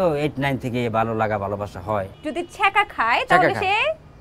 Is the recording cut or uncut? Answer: cut